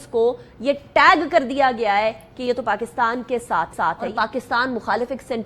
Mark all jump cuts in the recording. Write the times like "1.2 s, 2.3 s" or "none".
4.1 s